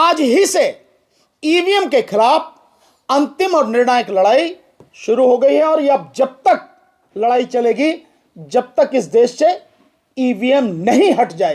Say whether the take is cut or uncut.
uncut